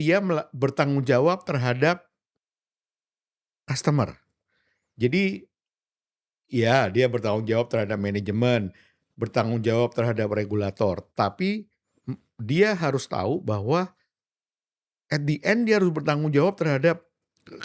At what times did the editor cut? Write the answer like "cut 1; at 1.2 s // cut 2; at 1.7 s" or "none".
none